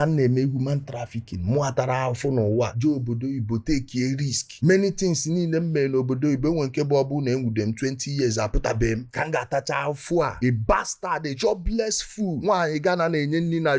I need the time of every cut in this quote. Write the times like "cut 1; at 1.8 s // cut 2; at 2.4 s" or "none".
none

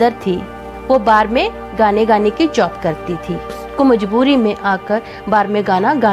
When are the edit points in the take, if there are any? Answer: cut 1; at 3.6 s

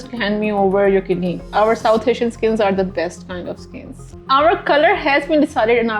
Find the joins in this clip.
cut 1; at 1.4 s // cut 2; at 4.2 s

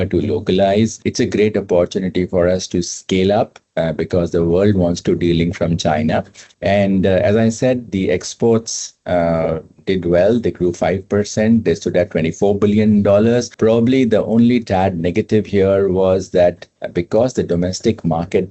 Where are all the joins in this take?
none

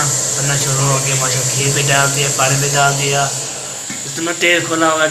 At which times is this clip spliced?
none

